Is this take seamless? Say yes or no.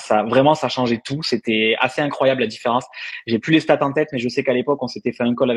yes